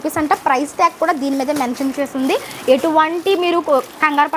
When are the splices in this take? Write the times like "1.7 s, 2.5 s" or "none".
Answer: none